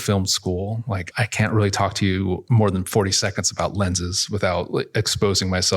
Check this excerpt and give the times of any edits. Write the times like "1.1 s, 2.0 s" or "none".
1.1 s, 2.5 s

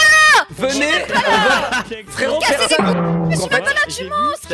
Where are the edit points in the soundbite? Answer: 3.4 s

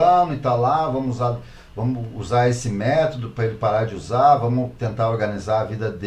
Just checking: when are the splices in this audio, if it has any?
none

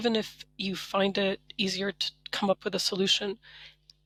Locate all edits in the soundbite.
none

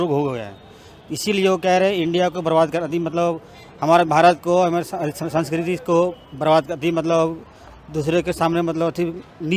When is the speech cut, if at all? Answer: none

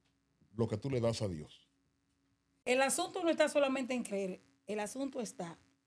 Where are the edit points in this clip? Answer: 2.6 s

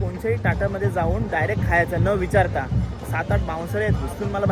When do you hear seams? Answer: none

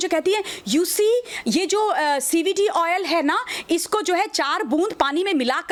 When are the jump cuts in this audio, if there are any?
none

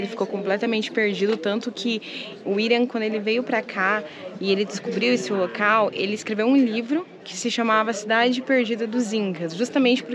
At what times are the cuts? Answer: none

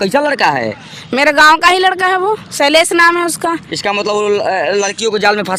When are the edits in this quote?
none

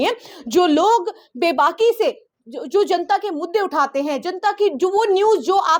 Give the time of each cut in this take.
none

